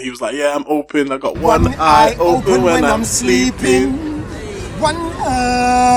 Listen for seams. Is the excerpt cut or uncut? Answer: uncut